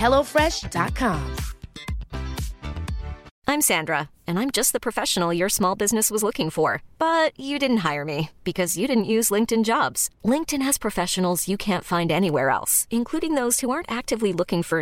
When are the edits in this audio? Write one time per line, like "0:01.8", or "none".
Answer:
0:03.3